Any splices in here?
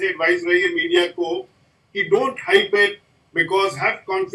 no; 0 cuts

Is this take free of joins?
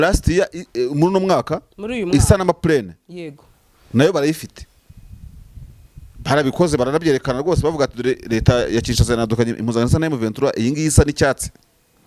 yes; 0 cuts

